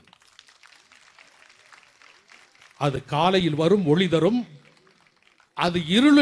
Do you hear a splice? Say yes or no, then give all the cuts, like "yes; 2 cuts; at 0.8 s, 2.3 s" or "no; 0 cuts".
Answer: no; 0 cuts